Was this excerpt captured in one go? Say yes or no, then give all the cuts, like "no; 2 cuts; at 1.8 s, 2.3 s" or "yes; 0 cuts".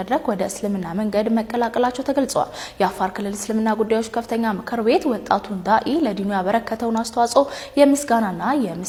yes; 0 cuts